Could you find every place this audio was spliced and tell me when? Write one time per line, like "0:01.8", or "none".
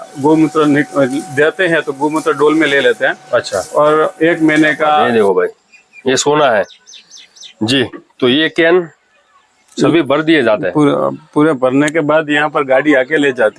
0:05.1